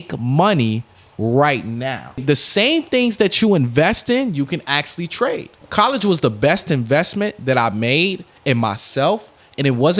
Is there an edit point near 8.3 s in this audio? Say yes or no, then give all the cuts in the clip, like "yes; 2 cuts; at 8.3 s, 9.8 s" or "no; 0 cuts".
no; 2 cuts; at 2.2 s, 5.6 s